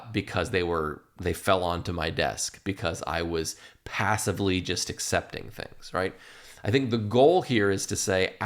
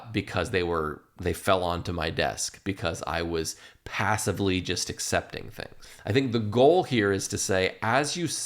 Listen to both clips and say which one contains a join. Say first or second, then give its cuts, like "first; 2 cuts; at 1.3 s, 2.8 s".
second; 1 cut; at 5.7 s